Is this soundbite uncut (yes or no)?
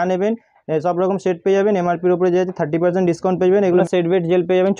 no